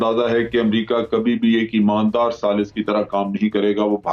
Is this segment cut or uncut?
uncut